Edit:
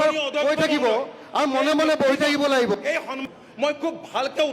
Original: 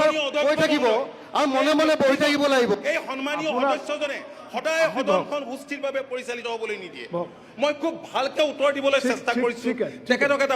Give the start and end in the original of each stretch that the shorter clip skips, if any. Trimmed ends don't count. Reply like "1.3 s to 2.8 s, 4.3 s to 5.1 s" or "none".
3.3 s to 7.3 s